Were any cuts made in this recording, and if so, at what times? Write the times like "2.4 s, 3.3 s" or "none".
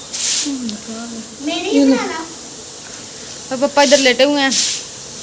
1.3 s